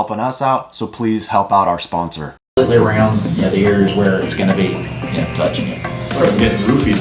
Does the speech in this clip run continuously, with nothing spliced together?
no; 1 cut; at 2.4 s

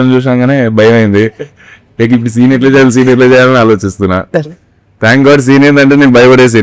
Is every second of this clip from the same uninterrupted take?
yes; 0 cuts

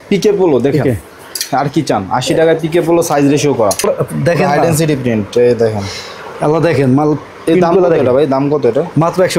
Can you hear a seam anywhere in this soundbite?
yes; 1 cut; at 3.8 s

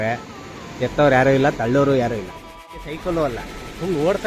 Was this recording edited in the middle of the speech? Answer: yes; 1 cut; at 2.8 s

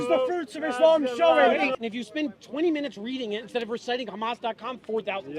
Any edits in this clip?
yes; 1 cut; at 1.8 s

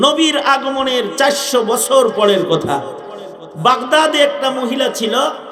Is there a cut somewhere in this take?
no; 0 cuts

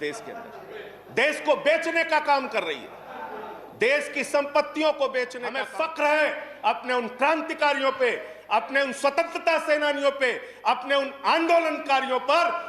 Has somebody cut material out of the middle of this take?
yes; 1 cut; at 5.4 s

